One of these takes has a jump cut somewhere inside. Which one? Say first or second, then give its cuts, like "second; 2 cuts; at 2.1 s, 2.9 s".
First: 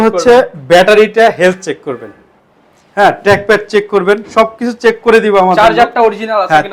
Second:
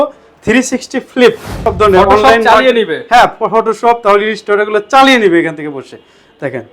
second; 1 cut; at 1.5 s